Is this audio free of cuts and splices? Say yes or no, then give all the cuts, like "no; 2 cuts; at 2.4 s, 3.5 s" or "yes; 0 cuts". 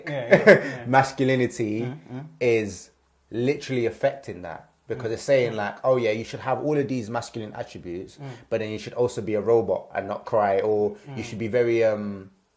yes; 0 cuts